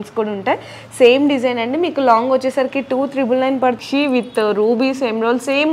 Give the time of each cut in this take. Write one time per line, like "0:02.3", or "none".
0:03.8